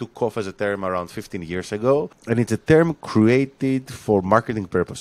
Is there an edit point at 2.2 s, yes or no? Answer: yes